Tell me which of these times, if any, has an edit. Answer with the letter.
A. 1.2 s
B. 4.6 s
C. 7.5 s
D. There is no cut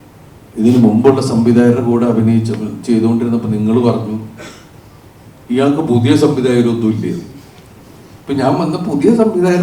D